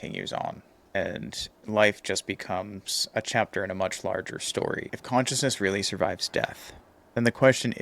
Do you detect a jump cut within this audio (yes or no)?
yes